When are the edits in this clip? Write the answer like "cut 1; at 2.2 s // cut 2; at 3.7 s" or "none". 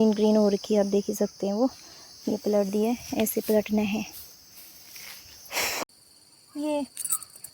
cut 1; at 5.8 s